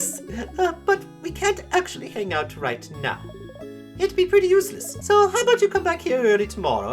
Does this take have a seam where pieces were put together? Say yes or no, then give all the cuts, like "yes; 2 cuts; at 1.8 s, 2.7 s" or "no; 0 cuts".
yes; 1 cut; at 4.9 s